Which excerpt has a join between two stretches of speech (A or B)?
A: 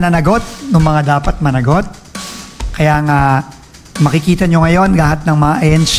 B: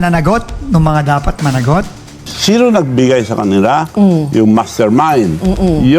B